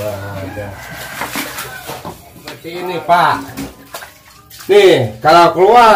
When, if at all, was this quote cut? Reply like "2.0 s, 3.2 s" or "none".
2.6 s